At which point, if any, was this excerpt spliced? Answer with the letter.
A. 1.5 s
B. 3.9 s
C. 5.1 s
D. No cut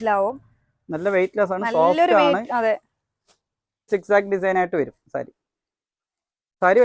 B